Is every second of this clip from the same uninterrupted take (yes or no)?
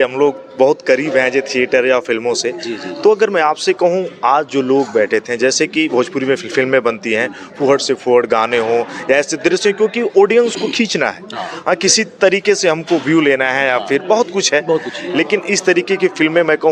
yes